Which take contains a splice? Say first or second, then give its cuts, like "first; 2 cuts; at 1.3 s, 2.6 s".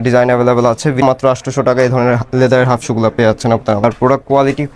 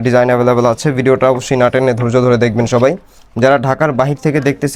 first; 2 cuts; at 1.0 s, 3.8 s